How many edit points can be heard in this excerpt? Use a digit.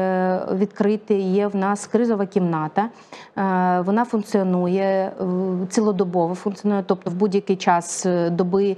0